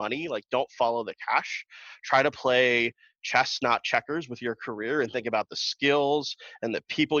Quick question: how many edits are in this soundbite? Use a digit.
0